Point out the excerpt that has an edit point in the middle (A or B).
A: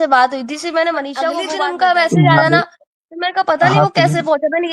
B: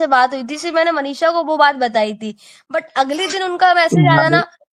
A